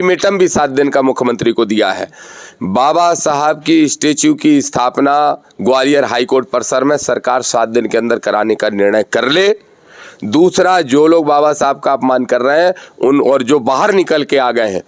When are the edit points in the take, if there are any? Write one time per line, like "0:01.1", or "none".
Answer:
none